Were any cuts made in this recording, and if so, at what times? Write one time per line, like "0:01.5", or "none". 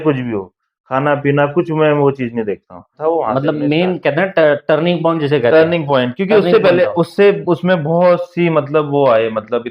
0:02.9